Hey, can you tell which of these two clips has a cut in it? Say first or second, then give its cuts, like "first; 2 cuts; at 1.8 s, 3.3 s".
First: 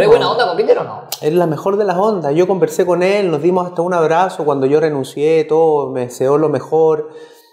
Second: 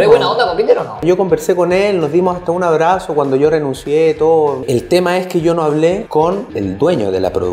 second; 3 cuts; at 1.0 s, 4.6 s, 6.4 s